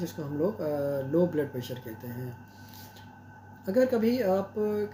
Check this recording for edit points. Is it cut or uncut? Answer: uncut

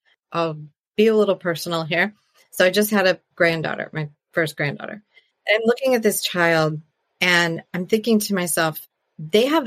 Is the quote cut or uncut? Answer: cut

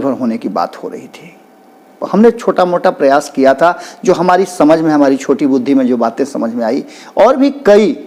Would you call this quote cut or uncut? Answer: uncut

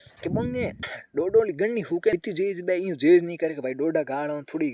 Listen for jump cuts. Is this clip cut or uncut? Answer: cut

